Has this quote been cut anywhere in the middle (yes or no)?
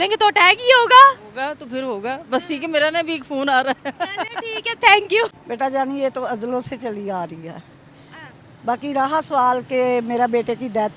no